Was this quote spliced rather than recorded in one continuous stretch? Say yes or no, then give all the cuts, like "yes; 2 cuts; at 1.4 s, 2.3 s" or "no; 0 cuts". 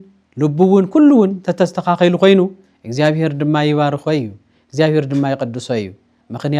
no; 0 cuts